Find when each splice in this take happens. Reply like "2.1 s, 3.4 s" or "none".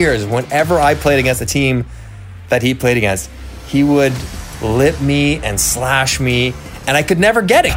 none